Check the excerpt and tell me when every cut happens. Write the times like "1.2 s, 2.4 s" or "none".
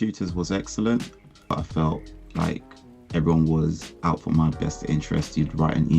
1.5 s

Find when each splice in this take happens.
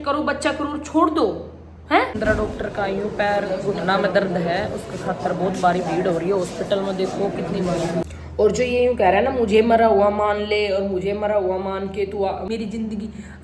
2.2 s, 8.1 s, 12.5 s

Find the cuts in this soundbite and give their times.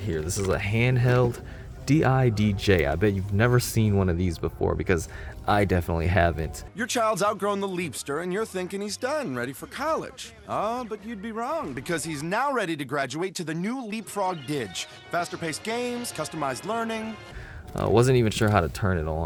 none

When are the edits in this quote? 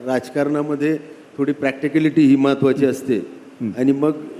none

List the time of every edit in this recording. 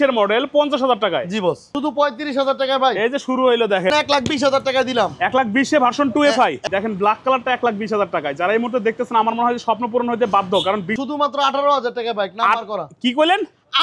1.8 s, 3.9 s, 6.6 s, 10.9 s

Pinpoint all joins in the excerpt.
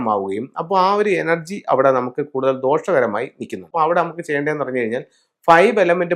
3.7 s

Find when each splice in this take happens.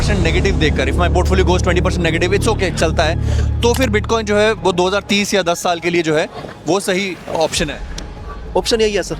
none

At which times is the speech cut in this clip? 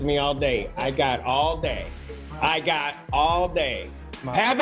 none

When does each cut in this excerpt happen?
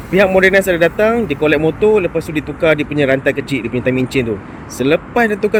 none

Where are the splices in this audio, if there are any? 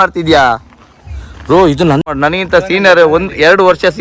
2.0 s

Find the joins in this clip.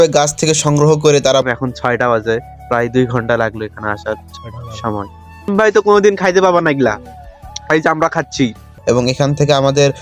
1.5 s, 5.5 s, 8.8 s

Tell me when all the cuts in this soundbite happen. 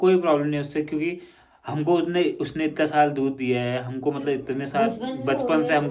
none

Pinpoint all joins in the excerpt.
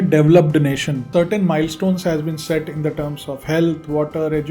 1.1 s

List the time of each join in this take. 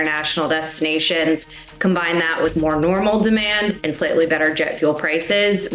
3.8 s

